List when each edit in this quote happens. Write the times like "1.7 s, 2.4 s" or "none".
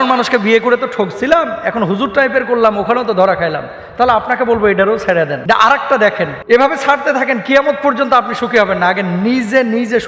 5.4 s, 6.4 s